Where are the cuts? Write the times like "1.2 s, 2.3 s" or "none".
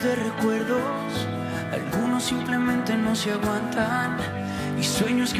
none